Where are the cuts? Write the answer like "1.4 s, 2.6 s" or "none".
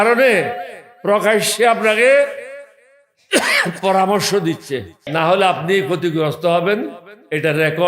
5.0 s